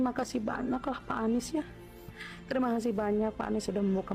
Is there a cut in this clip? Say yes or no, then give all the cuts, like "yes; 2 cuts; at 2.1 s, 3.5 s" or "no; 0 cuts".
no; 0 cuts